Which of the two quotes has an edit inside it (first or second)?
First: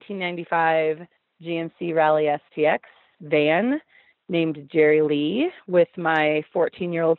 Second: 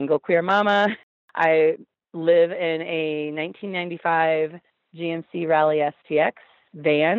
second